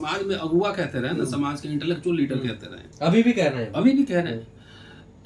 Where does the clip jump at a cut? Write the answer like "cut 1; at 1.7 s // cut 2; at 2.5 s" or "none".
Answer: none